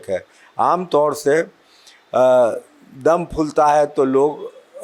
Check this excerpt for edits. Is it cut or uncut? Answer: uncut